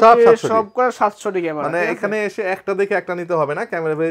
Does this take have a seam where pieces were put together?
no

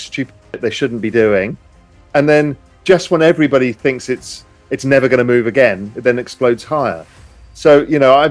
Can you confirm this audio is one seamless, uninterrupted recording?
no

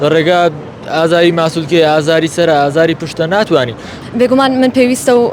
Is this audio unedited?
no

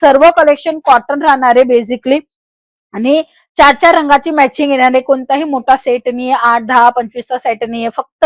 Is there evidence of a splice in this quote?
no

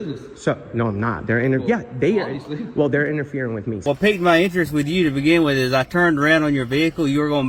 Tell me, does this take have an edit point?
yes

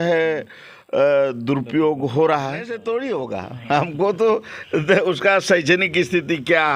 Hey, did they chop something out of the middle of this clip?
yes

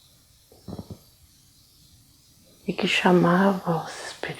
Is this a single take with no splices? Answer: yes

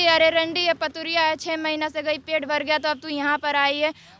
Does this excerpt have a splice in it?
no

